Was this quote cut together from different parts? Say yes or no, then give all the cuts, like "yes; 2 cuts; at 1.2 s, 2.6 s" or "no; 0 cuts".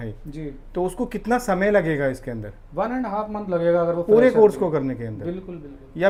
no; 0 cuts